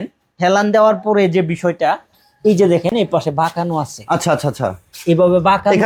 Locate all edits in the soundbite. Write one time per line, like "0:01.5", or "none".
none